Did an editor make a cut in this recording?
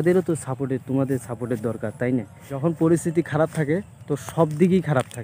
yes; 1 cut; at 2.6 s

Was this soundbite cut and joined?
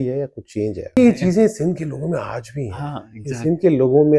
yes; 1 cut; at 0.9 s

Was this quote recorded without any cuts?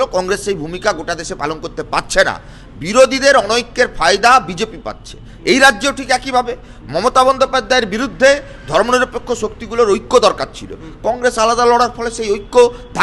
yes; 0 cuts

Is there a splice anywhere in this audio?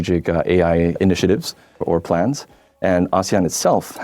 yes; 1 cut; at 0.9 s

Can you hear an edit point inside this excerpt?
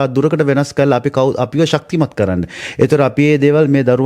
no; 0 cuts

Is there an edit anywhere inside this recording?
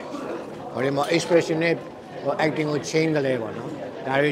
no; 0 cuts

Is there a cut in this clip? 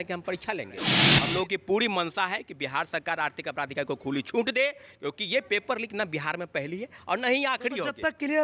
yes; 1 cut; at 1.0 s

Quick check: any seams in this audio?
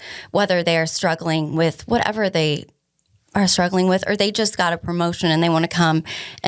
no; 0 cuts

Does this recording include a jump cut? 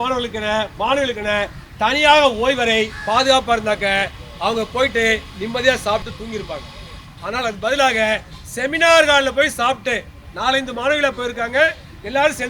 no; 0 cuts

